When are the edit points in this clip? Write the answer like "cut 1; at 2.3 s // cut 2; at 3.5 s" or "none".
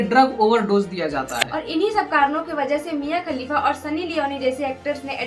cut 1; at 1.3 s